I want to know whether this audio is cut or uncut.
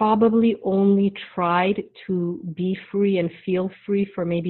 uncut